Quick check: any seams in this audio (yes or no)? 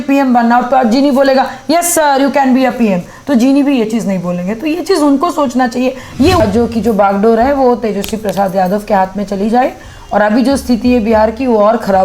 yes